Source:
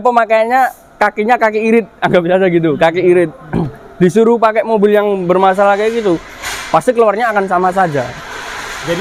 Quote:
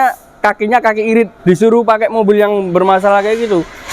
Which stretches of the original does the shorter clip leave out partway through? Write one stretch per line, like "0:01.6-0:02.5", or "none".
0:01.9-0:03.9